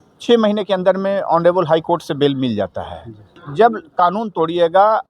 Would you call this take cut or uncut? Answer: cut